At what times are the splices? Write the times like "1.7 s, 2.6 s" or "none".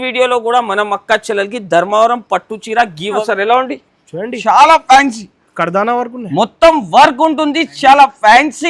3.2 s